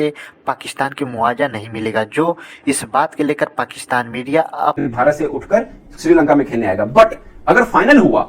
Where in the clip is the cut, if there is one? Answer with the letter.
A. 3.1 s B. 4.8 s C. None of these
B